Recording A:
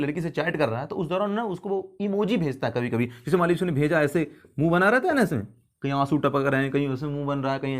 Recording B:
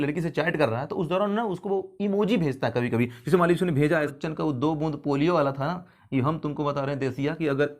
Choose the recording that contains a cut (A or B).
B